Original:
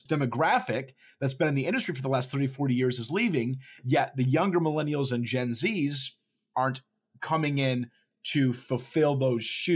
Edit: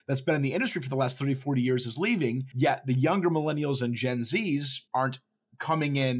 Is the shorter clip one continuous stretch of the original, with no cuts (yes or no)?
no